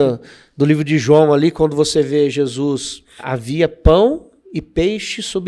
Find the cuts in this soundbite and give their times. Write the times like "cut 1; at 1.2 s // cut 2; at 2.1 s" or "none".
cut 1; at 3.3 s